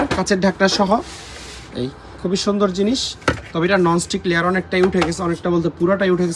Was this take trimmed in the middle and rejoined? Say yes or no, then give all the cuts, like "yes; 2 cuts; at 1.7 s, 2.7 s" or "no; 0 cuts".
no; 0 cuts